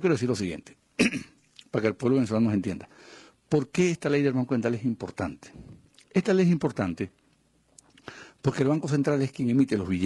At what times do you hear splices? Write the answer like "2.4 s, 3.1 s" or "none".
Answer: 4.0 s